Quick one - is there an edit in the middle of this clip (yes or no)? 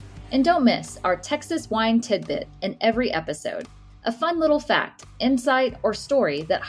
no